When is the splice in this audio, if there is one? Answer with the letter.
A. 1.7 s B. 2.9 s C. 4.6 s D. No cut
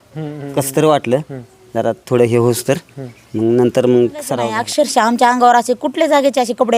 C